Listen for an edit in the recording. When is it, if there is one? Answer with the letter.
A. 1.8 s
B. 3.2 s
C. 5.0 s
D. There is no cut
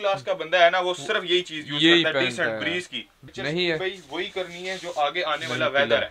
B